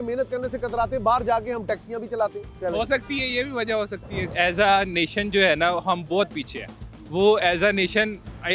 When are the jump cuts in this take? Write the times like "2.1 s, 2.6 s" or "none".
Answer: 2.5 s, 4.3 s

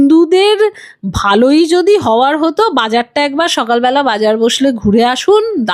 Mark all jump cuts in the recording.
none

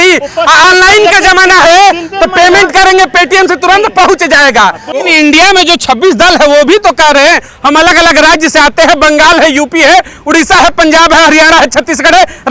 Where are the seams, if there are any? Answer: 5.0 s

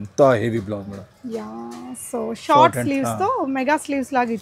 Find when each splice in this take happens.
none

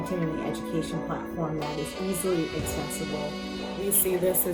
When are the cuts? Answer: none

